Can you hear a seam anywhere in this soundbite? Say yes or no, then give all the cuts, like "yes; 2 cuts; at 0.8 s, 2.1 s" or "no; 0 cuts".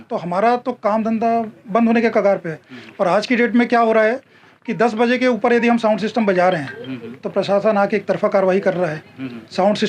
no; 0 cuts